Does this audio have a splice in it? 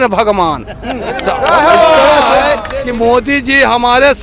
yes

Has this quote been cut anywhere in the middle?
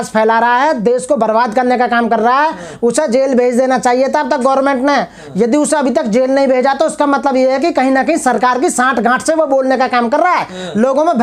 no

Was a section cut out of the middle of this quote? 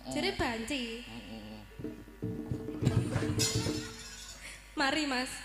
no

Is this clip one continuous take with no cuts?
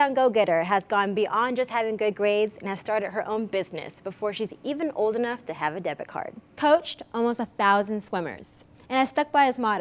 no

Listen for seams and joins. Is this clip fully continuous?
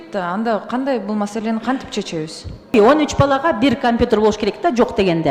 no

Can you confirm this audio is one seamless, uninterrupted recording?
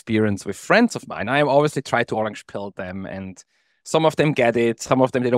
yes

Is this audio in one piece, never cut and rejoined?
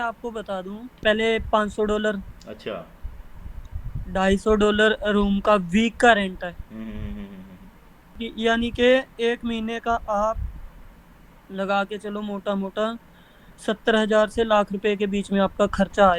no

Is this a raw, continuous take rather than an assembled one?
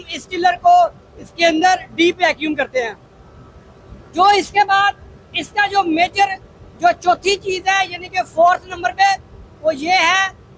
yes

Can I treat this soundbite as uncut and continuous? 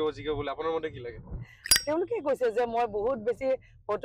no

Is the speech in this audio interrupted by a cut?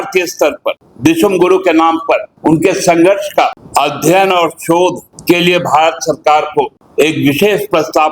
yes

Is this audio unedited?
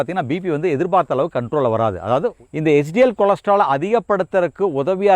no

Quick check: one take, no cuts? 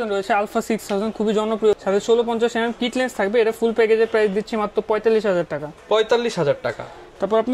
yes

